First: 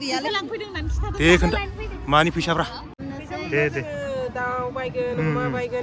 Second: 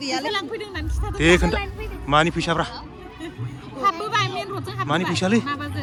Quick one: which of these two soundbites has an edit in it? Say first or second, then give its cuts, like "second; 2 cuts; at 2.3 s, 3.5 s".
first; 1 cut; at 3.0 s